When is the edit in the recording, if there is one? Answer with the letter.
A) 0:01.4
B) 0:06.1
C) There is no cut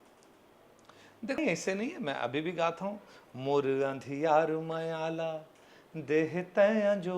A